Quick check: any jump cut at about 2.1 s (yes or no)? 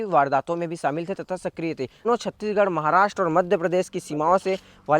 yes